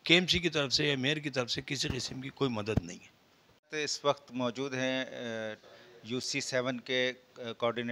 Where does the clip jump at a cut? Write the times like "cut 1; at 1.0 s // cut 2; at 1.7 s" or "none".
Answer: none